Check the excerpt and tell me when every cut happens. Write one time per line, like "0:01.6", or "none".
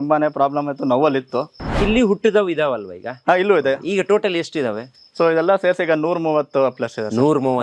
0:01.7